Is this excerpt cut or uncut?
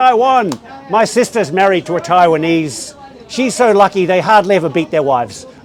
uncut